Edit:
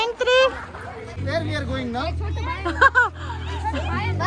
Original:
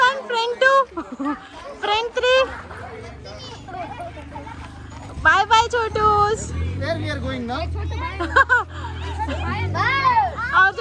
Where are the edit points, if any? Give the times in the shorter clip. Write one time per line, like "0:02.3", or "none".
0:01.1